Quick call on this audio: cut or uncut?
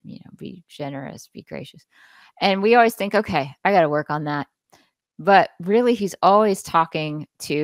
uncut